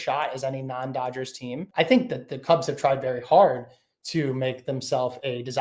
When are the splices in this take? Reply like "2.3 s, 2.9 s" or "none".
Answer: 1.6 s